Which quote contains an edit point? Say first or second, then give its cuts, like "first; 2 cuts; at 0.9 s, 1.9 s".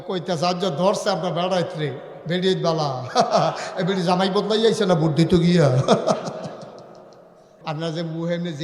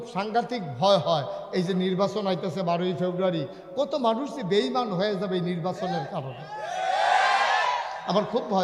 first; 1 cut; at 7.5 s